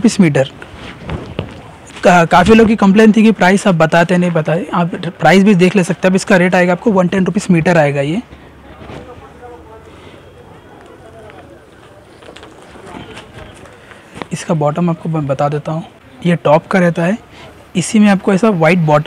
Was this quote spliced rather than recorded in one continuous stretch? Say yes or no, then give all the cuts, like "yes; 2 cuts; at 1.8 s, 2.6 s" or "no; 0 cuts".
no; 0 cuts